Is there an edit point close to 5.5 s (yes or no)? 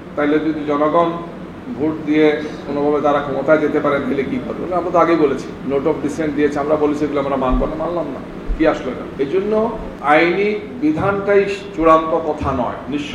yes